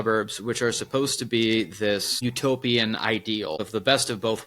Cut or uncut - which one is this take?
cut